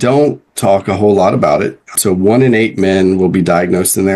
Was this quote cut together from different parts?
yes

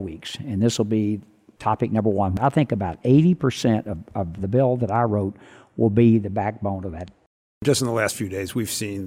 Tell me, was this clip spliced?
yes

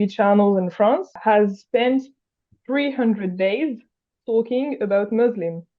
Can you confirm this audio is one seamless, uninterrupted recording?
no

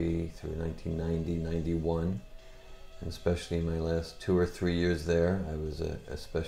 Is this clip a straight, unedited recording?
yes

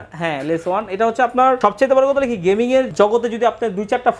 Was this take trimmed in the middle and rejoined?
yes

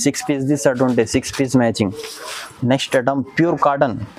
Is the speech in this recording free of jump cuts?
no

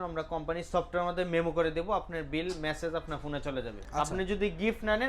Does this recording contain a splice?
yes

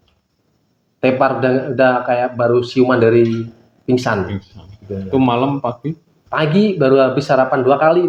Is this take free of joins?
yes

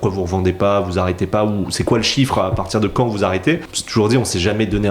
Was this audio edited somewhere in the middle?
yes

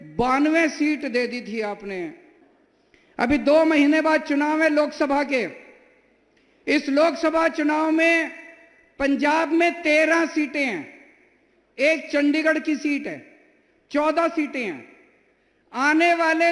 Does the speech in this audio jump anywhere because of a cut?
yes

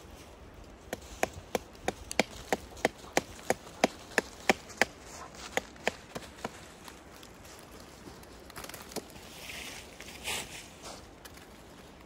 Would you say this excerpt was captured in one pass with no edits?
yes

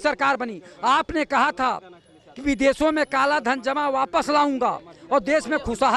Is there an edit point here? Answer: no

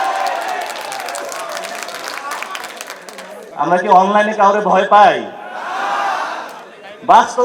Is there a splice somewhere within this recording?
yes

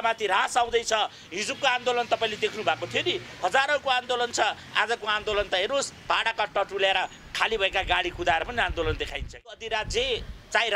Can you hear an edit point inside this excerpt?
yes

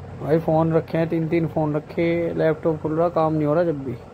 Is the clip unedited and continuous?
yes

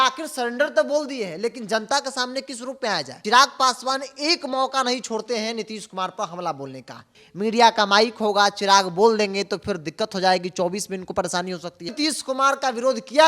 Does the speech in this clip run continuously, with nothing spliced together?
no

